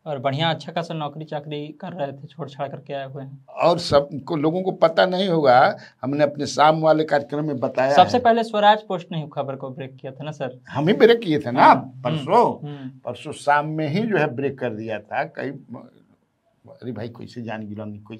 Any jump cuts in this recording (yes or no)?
no